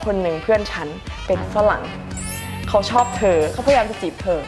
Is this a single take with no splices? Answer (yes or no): no